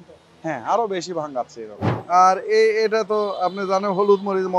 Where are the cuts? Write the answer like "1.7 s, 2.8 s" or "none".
1.9 s

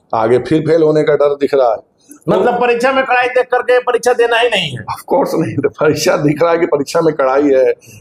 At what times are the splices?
none

